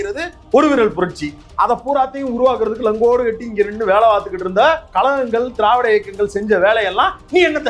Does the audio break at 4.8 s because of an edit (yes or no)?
yes